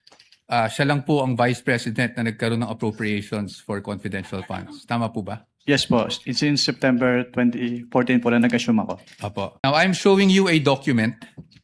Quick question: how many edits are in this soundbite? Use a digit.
0